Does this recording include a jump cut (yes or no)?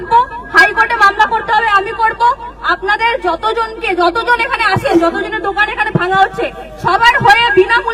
no